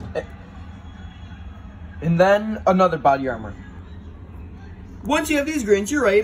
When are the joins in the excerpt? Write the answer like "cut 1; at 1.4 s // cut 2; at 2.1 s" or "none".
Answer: cut 1; at 3.6 s